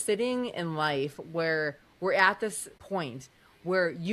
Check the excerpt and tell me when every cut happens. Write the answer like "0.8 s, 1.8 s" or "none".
2.8 s